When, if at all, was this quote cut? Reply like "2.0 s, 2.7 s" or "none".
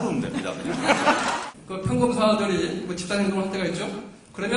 1.4 s